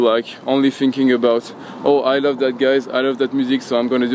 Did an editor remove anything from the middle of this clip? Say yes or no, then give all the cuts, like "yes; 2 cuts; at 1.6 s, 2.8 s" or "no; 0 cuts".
no; 0 cuts